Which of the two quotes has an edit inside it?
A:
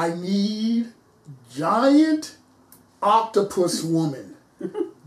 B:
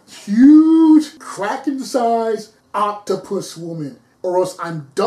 B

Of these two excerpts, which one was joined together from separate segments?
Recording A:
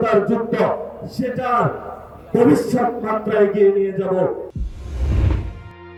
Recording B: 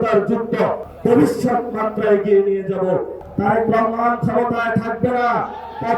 B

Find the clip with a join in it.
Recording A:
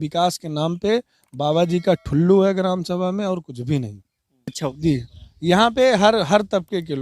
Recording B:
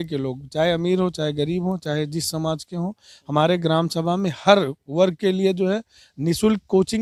A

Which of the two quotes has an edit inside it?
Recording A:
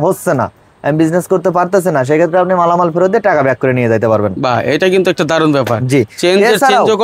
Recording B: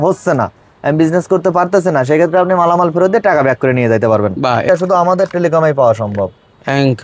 B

